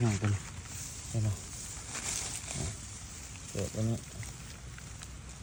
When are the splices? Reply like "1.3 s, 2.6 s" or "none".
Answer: none